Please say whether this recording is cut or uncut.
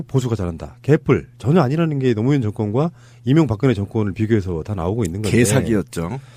uncut